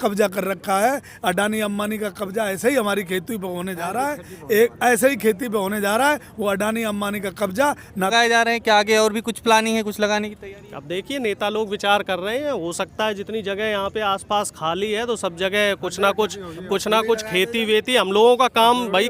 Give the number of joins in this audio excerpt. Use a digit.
1